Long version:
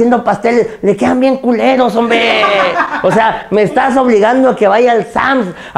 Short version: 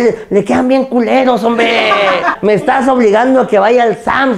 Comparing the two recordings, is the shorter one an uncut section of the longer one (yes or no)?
no